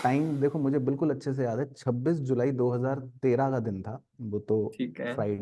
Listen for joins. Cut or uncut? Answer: uncut